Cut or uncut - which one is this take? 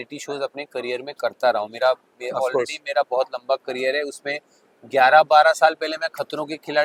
uncut